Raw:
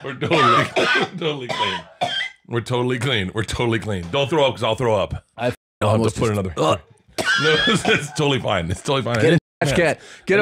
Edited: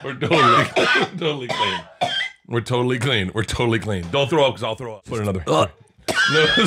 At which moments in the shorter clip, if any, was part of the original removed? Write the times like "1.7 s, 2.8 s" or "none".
4.9 s

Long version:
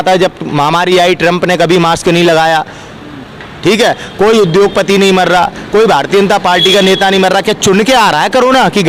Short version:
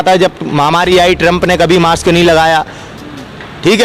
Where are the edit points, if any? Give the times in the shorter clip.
none

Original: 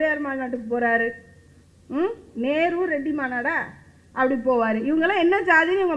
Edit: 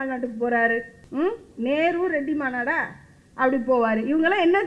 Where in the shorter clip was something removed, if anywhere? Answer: 1.0 s

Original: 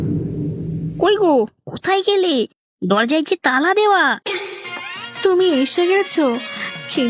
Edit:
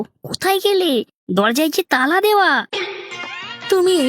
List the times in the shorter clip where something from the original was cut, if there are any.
1.2 s

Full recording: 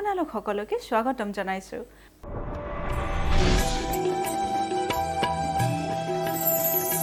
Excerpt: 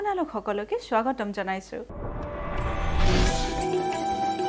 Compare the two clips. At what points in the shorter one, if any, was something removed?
2.0 s

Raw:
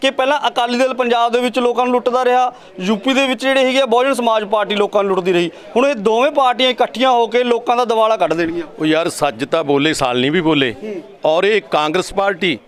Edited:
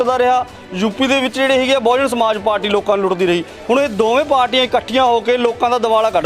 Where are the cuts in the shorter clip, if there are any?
none

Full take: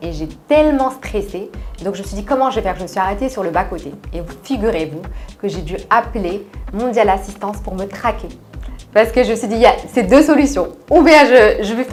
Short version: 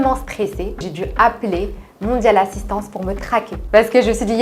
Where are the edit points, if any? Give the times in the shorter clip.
0.9 s, 3.6 s

